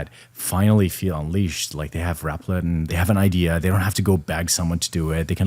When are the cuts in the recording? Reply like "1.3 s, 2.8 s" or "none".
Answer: none